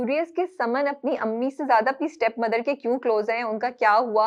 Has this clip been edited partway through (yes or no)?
no